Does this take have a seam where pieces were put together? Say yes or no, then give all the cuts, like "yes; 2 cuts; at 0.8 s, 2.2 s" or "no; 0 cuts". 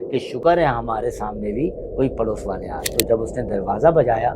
yes; 1 cut; at 2.8 s